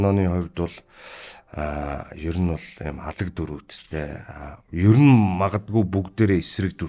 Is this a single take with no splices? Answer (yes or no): yes